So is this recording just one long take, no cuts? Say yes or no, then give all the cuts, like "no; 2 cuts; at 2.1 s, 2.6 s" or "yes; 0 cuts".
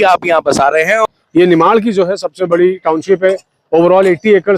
no; 1 cut; at 1.0 s